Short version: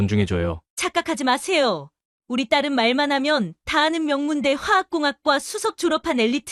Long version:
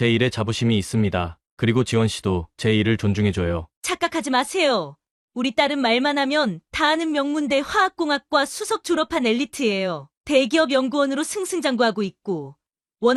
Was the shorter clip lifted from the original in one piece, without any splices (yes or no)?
yes